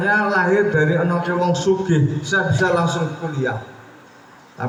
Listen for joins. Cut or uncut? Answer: uncut